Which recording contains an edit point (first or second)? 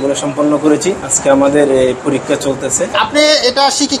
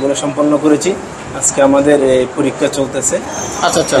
first